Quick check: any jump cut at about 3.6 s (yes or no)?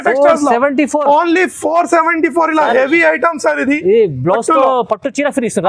no